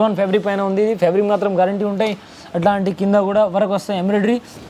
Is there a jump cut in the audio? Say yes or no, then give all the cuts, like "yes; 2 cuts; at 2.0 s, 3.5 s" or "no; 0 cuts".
no; 0 cuts